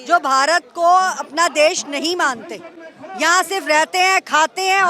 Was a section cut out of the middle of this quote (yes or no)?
no